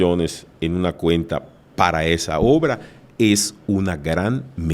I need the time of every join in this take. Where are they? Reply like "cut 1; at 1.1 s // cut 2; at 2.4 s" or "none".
none